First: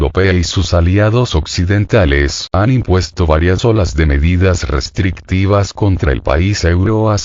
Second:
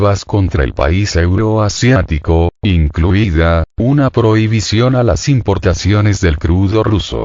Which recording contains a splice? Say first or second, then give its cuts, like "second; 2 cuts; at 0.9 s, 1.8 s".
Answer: first; 1 cut; at 3.7 s